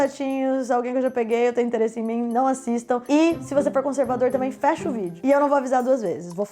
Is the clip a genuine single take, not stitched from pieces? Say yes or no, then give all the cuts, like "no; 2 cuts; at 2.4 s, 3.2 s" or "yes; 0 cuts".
yes; 0 cuts